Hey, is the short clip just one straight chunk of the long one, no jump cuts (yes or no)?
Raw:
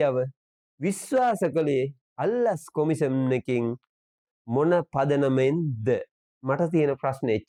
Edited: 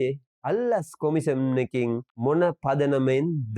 no